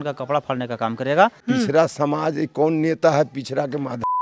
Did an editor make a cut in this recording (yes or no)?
yes